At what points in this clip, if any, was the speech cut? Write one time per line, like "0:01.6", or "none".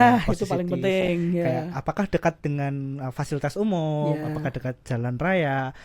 none